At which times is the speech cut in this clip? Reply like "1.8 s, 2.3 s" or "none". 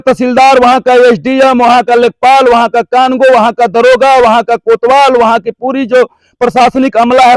none